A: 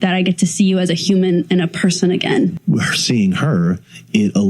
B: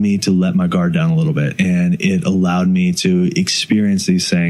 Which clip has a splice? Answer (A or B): A